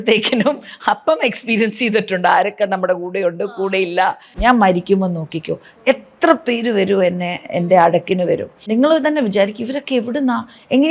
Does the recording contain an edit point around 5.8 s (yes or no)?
no